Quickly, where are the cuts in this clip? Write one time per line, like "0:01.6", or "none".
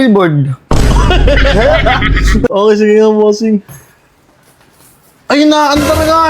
0:02.5